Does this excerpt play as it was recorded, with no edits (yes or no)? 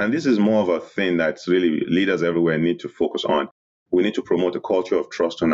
no